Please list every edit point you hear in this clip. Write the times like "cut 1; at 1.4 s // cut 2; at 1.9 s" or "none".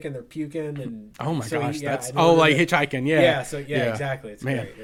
none